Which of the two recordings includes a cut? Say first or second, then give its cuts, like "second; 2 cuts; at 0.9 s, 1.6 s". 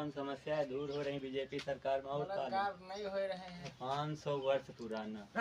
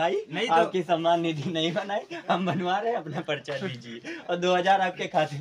first; 1 cut; at 3.7 s